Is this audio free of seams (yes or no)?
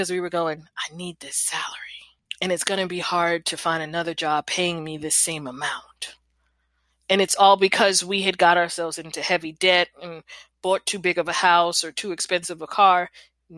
yes